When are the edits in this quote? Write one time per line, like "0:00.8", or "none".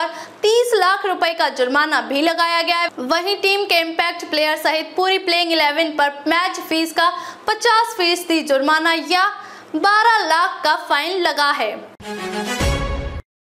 0:12.0